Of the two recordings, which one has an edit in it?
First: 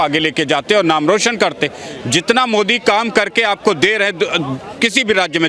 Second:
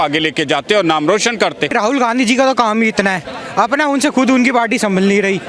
second; 1 cut; at 1.7 s

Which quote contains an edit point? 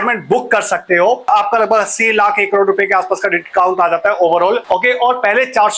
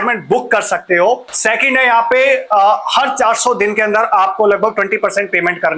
first; 2 cuts; at 1.2 s, 4.6 s

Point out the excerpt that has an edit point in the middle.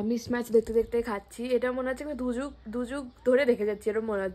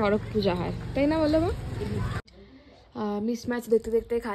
second; 1 cut; at 2.3 s

